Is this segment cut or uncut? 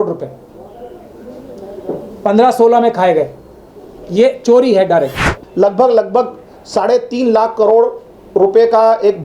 cut